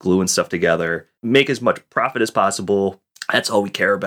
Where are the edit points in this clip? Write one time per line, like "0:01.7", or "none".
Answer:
0:01.1

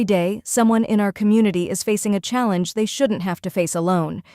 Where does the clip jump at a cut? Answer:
none

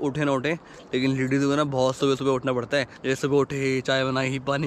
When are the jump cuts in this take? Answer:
0:02.9

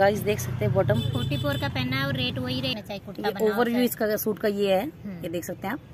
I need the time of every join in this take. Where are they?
0:02.8

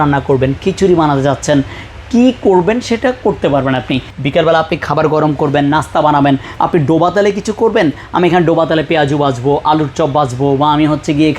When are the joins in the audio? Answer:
0:04.1

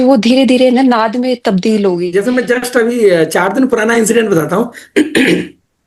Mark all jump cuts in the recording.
0:02.1

